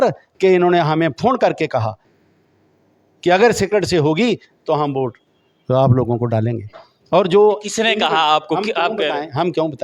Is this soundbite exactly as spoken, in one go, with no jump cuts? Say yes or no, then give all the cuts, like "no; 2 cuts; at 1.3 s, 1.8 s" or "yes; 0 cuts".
yes; 0 cuts